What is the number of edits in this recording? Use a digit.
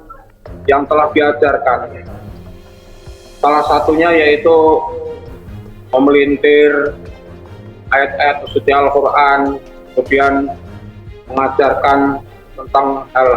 2